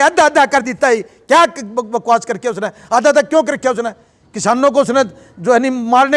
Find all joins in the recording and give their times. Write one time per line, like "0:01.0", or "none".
none